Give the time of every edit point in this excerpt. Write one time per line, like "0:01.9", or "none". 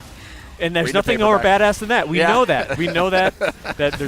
none